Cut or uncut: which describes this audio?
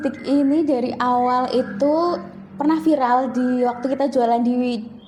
uncut